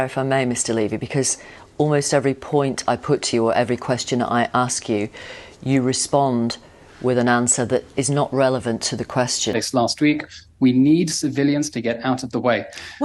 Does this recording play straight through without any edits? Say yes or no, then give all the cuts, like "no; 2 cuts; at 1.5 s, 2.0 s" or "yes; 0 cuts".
no; 1 cut; at 9.5 s